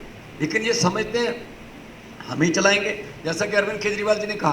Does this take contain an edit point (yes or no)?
no